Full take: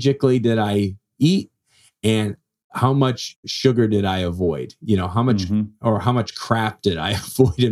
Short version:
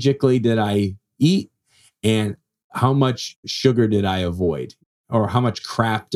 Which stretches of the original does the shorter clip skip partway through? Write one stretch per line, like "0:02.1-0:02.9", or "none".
0:04.9-0:05.6

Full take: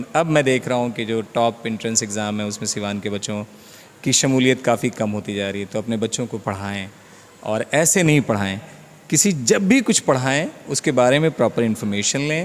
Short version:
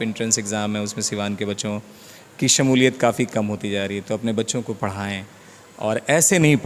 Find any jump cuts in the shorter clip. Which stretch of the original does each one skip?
none

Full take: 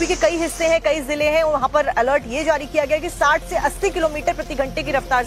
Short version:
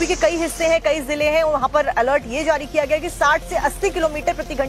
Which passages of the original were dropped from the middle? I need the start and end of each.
none

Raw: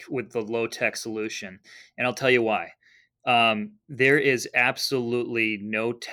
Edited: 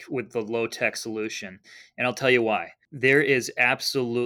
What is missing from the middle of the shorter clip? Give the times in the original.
0:02.8-0:03.8

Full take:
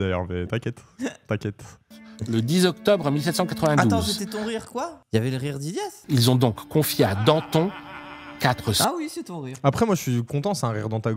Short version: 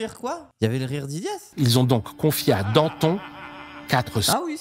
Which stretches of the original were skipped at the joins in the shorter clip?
none

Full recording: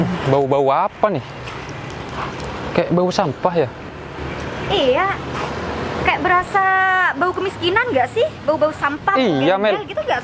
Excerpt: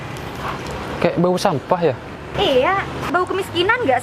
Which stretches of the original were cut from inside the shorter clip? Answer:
0:03.9-0:04.5
0:05.4-0:07.1

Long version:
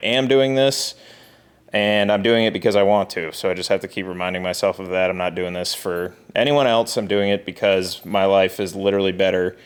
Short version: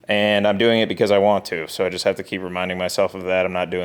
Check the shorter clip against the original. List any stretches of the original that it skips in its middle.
none

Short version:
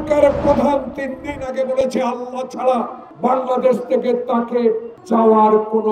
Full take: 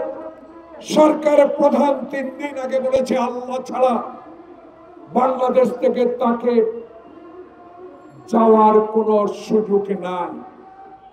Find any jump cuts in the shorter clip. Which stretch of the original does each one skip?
0:04.2-0:04.9
0:06.8-0:08.1

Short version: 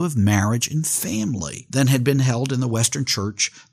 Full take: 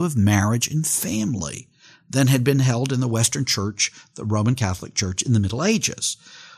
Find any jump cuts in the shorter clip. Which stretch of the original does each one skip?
0:01.6-0:02.0

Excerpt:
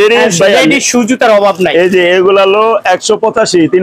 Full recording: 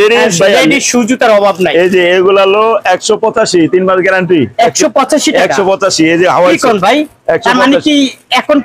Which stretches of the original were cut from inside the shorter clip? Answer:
none

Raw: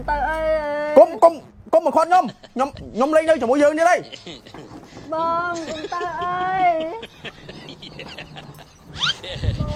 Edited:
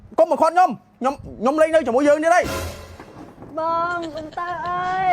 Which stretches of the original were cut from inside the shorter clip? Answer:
none

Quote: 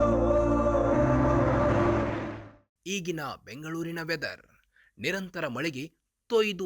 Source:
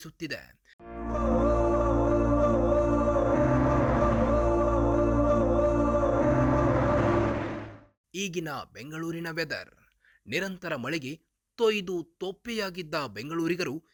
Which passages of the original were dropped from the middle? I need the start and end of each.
0:03.7-0:06.6

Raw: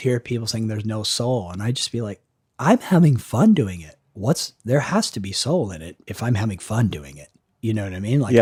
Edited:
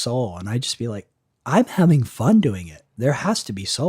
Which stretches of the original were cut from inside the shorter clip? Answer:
0:04.0-0:04.5

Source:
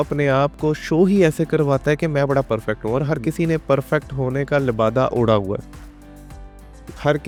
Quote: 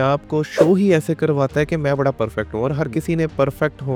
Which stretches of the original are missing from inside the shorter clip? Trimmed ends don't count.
none

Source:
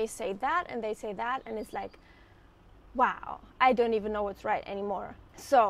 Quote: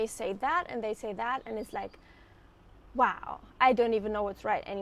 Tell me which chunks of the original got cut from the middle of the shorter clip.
none

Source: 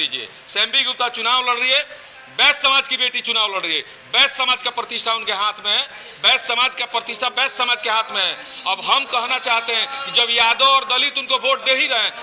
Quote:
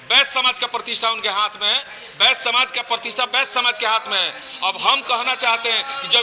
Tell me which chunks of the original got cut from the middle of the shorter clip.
none

